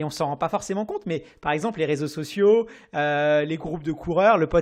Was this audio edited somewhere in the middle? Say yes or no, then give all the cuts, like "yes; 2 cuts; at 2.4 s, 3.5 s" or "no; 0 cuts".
no; 0 cuts